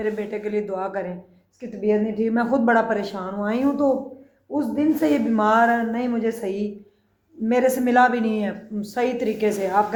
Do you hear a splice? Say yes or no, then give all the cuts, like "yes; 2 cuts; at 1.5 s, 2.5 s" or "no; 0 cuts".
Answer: no; 0 cuts